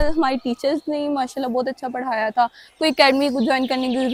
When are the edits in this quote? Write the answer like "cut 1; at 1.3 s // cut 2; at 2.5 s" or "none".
none